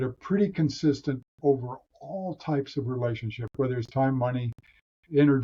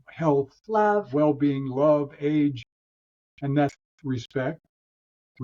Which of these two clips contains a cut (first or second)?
second